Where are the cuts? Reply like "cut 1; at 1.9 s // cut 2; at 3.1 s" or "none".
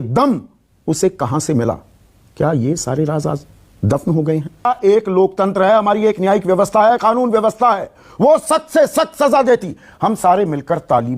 cut 1; at 4.7 s